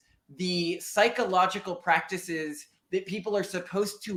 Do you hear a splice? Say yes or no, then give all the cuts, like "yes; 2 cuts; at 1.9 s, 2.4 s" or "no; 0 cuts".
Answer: no; 0 cuts